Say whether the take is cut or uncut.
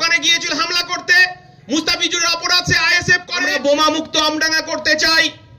cut